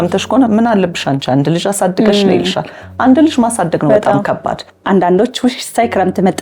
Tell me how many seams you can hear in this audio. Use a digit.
1